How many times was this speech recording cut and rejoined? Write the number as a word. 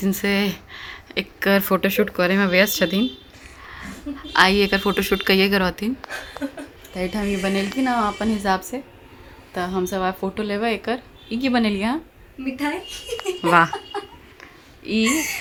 zero